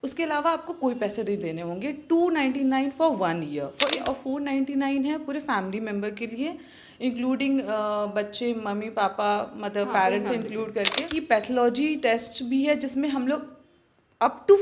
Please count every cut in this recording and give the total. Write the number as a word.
two